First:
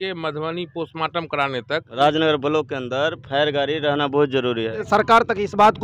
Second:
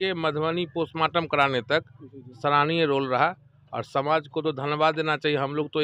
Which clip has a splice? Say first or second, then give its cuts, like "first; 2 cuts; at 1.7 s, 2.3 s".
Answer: first; 2 cuts; at 2.0 s, 4.8 s